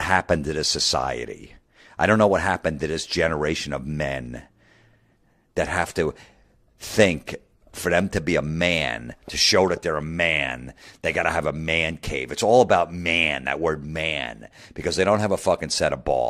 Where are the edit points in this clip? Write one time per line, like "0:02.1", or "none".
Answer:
none